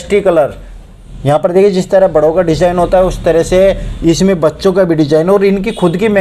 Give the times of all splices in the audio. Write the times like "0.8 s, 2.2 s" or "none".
none